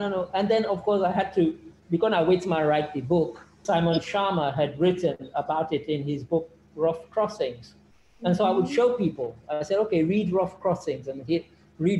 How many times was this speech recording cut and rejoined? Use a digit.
1